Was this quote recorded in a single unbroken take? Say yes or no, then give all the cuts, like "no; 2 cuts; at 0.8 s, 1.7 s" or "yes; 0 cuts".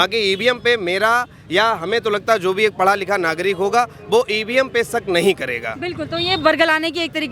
yes; 0 cuts